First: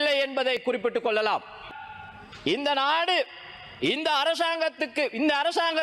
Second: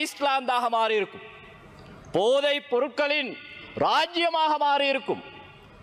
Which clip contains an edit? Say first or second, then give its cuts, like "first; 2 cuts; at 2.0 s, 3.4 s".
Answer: first; 1 cut; at 1.7 s